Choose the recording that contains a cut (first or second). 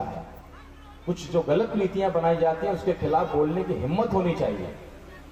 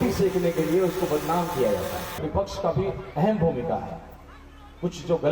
second